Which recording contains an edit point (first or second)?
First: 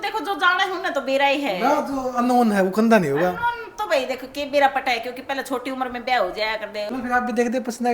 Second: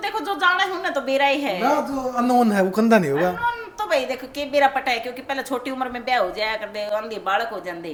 first